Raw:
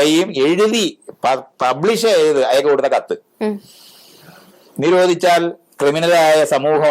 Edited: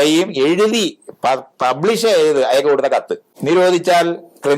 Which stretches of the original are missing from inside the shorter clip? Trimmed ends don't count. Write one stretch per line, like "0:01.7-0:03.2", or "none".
0:03.2-0:04.6